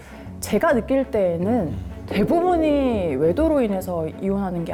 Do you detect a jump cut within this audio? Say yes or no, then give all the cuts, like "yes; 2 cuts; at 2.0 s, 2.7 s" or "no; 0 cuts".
no; 0 cuts